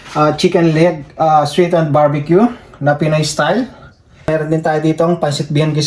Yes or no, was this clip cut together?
yes